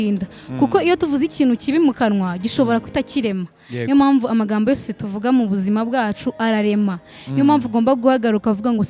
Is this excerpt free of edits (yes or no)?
yes